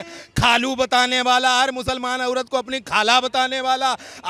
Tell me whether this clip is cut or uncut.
uncut